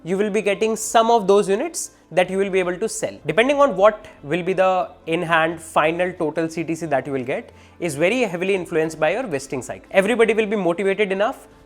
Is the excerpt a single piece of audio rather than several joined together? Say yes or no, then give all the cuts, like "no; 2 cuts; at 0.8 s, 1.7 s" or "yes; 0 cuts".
no; 2 cuts; at 3.2 s, 9.7 s